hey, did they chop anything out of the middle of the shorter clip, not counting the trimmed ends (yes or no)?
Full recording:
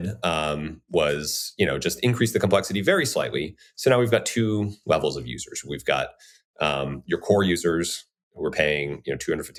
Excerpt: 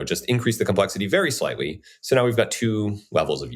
no